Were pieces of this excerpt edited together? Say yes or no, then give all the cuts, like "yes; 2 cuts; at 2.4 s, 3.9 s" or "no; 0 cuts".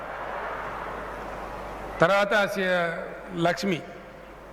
no; 0 cuts